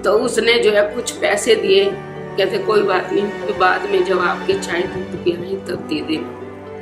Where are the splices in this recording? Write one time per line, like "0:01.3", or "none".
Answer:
none